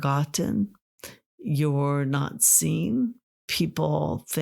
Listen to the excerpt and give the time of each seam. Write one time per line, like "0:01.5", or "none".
0:03.4